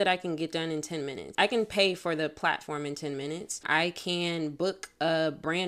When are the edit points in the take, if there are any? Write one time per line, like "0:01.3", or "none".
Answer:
0:01.3
0:03.6

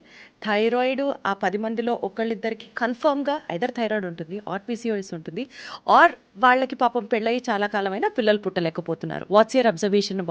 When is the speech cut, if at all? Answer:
0:09.3

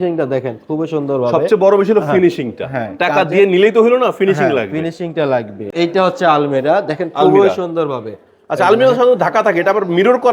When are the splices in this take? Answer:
0:05.6

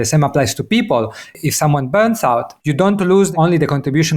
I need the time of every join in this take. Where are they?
0:02.6
0:03.3

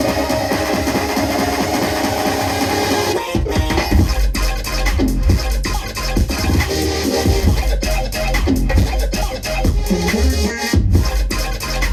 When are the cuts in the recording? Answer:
none

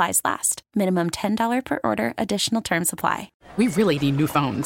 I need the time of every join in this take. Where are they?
0:03.3

